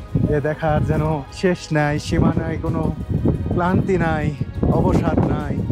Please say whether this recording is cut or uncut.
cut